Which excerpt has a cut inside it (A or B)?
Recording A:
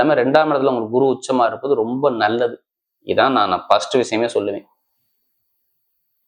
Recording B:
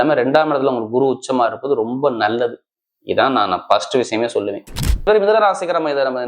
B